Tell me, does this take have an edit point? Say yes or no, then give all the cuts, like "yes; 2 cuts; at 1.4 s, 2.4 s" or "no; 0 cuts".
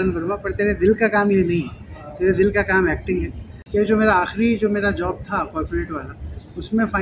yes; 1 cut; at 3.5 s